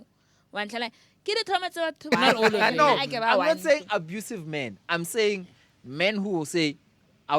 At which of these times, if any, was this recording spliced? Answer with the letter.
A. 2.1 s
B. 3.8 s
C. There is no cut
A